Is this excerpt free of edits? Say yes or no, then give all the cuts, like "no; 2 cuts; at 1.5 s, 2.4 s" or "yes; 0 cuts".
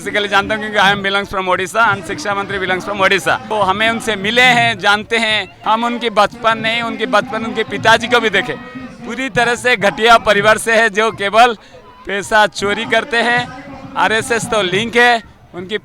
no; 2 cuts; at 3.5 s, 5.5 s